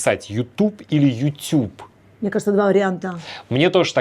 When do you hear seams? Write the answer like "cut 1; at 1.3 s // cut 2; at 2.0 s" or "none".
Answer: none